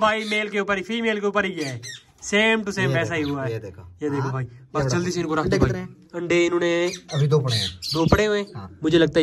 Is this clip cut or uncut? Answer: uncut